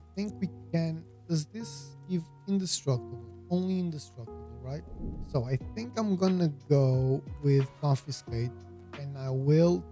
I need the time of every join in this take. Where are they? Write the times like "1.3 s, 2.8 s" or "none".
none